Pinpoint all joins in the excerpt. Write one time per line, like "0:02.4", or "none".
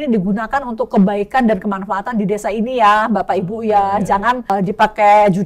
0:04.5